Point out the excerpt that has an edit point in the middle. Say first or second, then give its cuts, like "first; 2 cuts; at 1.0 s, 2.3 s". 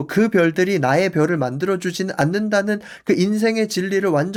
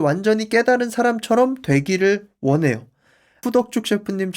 second; 1 cut; at 3.4 s